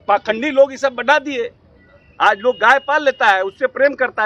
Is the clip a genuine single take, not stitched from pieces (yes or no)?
yes